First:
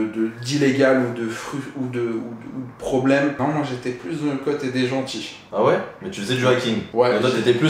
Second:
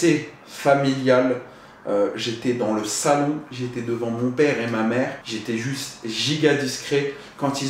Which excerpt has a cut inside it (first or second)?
first